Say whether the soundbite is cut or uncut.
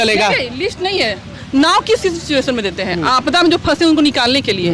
uncut